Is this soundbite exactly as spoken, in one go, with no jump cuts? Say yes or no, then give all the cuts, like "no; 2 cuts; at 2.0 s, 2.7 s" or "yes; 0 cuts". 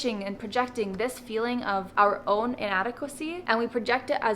no; 2 cuts; at 1.9 s, 3.4 s